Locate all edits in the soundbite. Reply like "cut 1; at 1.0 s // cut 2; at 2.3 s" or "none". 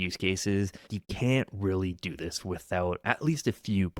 cut 1; at 1.0 s